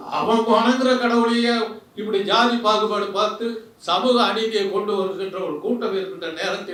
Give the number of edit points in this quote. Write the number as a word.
zero